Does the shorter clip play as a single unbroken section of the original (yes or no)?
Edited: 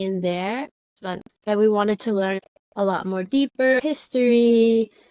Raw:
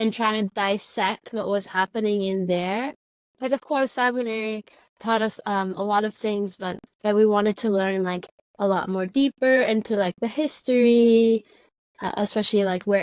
no